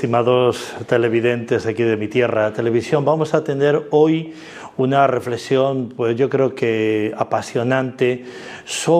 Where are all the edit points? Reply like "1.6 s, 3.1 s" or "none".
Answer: 7.9 s